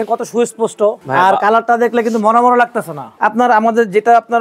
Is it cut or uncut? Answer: cut